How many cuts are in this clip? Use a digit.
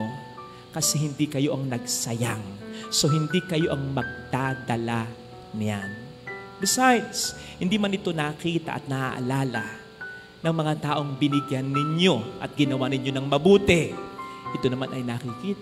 0